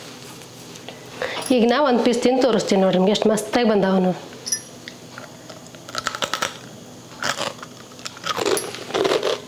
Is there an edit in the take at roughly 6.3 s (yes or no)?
no